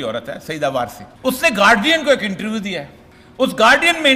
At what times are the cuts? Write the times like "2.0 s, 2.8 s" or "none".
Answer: 1.0 s